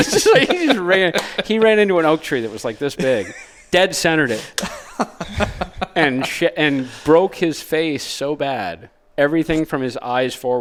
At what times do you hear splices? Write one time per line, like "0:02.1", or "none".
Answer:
none